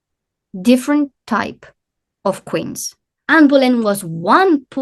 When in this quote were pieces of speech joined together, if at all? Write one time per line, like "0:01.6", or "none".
0:03.1